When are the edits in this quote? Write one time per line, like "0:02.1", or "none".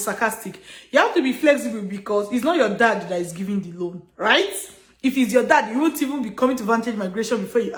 none